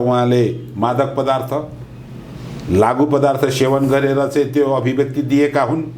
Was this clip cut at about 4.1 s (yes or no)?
no